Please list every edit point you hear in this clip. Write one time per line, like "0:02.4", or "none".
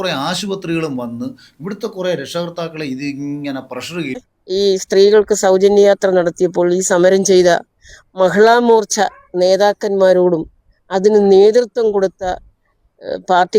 0:04.3